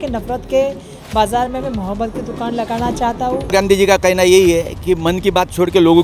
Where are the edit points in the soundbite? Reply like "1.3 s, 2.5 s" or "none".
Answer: 3.5 s

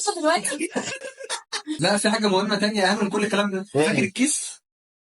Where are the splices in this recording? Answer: 1.7 s

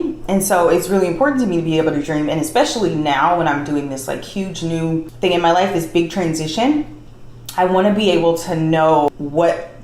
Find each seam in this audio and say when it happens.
5.1 s, 9.1 s

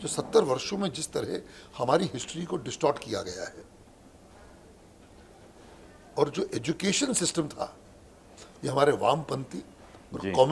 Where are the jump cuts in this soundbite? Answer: none

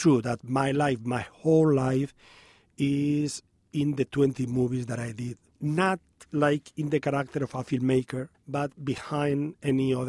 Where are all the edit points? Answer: 5.5 s, 6.1 s, 8.3 s

